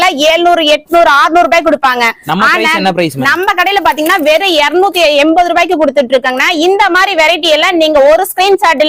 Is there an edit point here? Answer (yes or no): no